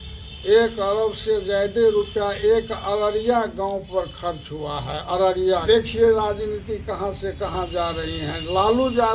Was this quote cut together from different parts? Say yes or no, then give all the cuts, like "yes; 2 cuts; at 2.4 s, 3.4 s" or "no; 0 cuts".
yes; 1 cut; at 5.6 s